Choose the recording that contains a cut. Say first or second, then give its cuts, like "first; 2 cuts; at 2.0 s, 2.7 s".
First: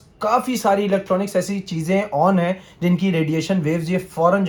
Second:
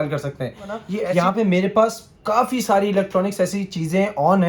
second; 1 cut; at 0.9 s